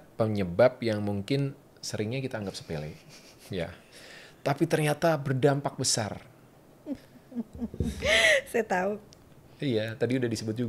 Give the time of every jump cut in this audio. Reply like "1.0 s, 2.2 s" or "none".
none